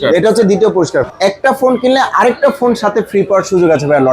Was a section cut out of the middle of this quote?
yes; 1 cut; at 1.1 s

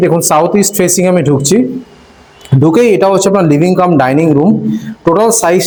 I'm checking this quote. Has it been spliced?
no; 0 cuts

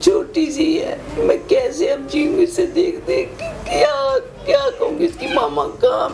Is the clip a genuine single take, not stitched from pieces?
yes; 0 cuts

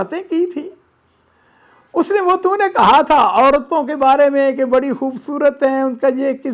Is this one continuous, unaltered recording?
yes; 0 cuts

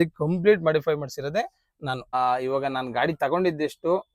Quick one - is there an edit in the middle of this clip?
yes; 1 cut; at 2.1 s

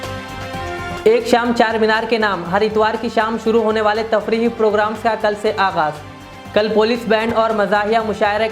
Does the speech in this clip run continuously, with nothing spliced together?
no; 1 cut; at 1.0 s

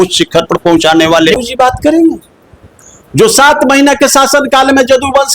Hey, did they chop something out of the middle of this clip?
yes; 1 cut; at 1.3 s

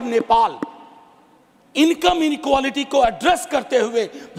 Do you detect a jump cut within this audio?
no; 0 cuts

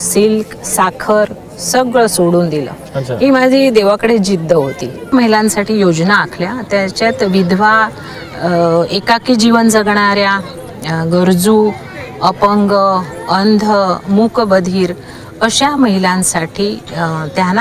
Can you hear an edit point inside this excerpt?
yes; 1 cut; at 5.1 s

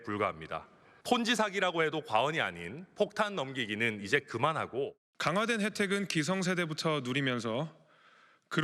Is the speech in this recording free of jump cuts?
no; 1 cut; at 5.1 s

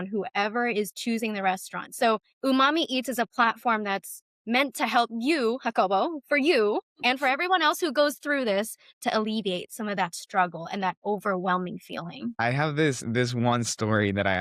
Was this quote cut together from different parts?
no; 0 cuts

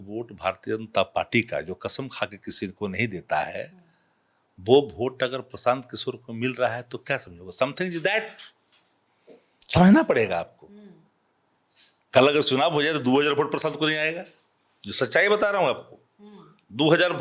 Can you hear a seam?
no; 0 cuts

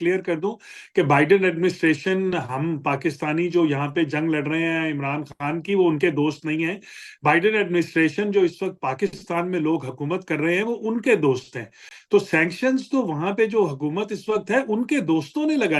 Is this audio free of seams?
yes; 0 cuts

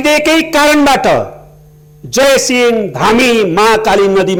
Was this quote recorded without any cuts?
yes; 0 cuts

